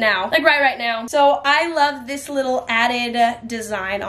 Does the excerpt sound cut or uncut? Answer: uncut